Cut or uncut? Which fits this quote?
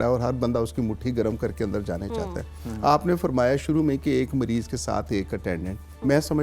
uncut